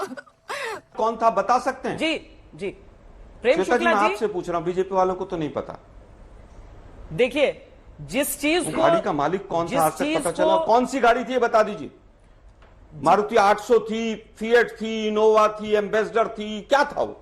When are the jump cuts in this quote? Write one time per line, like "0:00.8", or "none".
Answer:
0:00.9